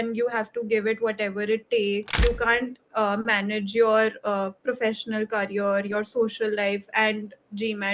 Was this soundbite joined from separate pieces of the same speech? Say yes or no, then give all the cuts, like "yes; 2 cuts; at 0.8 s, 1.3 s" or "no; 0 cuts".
yes; 1 cut; at 2.2 s